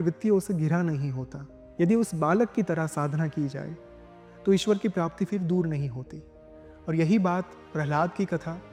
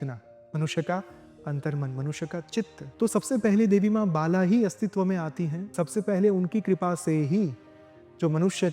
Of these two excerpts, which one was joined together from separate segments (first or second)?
second